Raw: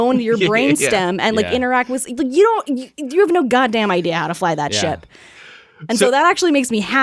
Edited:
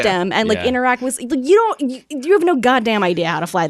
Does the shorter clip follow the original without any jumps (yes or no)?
yes